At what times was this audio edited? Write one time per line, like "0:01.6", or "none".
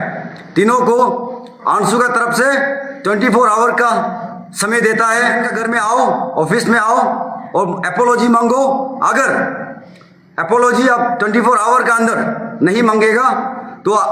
0:05.6